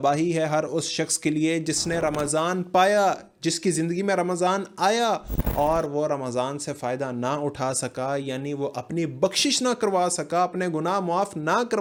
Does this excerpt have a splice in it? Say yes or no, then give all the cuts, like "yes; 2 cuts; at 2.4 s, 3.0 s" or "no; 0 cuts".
no; 0 cuts